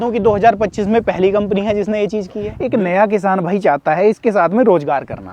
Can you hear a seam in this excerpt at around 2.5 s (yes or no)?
yes